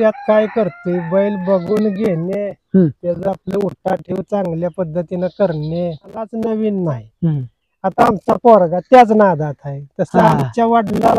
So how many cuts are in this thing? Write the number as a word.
one